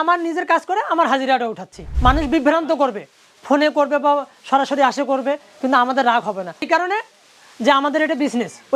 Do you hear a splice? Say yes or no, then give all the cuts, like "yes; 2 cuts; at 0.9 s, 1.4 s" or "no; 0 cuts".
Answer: yes; 2 cuts; at 1.9 s, 6.6 s